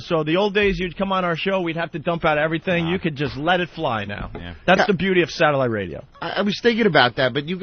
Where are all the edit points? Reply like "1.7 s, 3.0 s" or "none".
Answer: 6.2 s